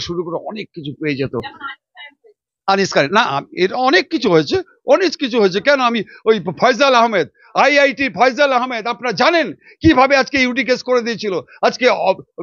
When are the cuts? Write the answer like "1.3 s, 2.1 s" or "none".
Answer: none